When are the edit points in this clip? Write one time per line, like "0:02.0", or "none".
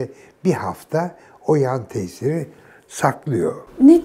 none